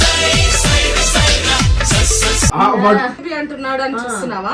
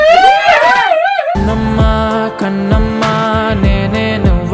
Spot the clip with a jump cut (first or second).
first